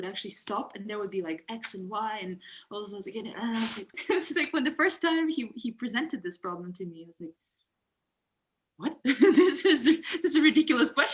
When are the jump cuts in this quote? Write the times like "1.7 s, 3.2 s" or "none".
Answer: 4.0 s